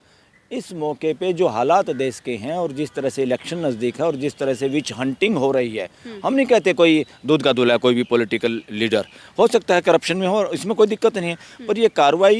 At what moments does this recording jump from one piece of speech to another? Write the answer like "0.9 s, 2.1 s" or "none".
none